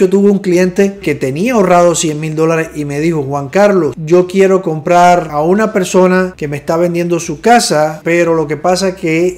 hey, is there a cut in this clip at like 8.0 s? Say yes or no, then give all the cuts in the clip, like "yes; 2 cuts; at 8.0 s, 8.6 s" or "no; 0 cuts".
yes; 4 cuts; at 4.0 s, 5.3 s, 6.4 s, 8.0 s